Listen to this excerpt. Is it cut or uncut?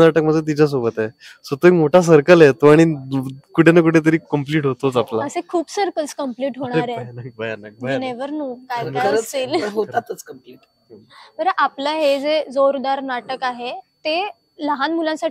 uncut